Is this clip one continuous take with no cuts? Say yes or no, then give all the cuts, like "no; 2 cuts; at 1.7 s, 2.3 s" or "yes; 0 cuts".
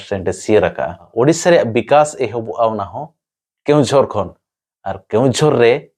no; 1 cut; at 1.0 s